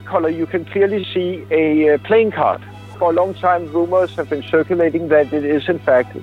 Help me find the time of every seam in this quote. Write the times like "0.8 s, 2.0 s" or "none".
2.9 s